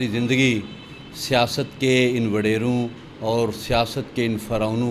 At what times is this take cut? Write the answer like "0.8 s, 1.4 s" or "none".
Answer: none